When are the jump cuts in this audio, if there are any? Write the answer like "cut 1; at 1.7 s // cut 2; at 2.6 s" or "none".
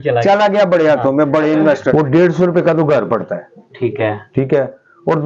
cut 1; at 1.9 s